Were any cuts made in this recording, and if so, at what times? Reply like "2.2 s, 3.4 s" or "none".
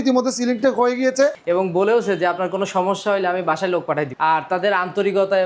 1.4 s, 4.1 s